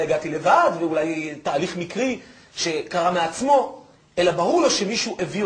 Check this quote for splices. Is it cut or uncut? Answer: cut